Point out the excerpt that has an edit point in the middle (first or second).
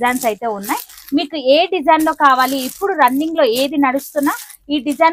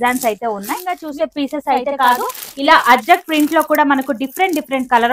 second